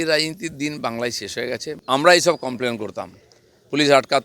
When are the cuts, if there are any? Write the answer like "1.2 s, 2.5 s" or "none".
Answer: 1.7 s